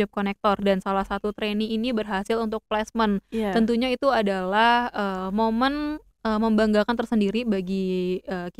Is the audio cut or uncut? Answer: uncut